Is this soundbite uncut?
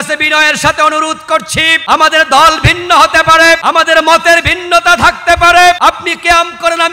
no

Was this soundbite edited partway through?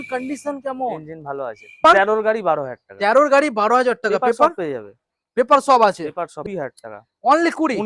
yes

